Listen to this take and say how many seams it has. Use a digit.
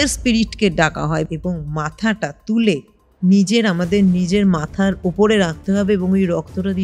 1